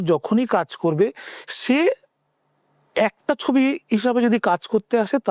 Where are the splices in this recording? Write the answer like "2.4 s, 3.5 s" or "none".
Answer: none